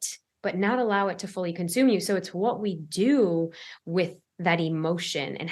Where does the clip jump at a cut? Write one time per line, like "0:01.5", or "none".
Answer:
none